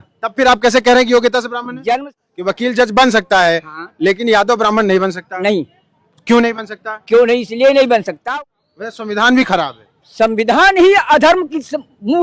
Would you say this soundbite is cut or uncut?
cut